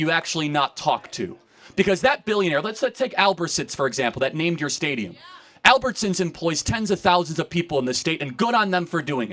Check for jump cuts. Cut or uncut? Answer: uncut